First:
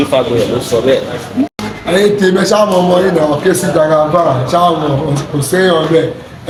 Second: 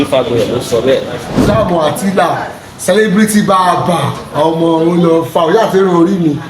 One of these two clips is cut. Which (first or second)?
second